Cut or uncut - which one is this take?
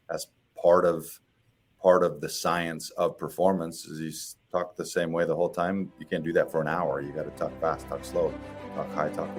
uncut